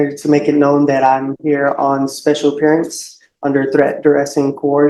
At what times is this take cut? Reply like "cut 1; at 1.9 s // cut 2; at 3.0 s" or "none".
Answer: none